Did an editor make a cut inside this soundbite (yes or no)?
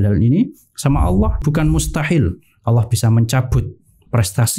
yes